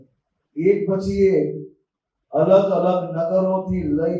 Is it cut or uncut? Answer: uncut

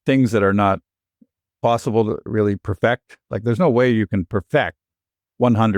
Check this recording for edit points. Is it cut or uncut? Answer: cut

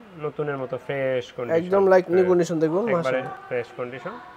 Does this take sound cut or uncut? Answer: uncut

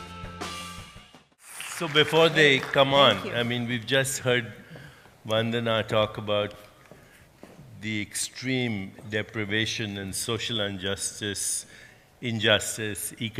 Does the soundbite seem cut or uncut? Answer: cut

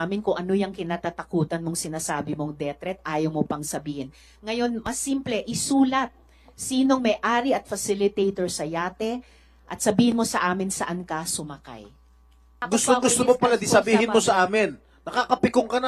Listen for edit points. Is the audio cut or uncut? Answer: cut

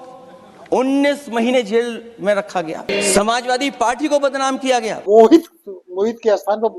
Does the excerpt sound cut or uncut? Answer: cut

